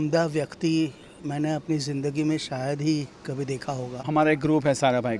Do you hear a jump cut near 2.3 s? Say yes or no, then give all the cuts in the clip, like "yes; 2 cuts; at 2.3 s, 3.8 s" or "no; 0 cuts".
no; 1 cut; at 3.9 s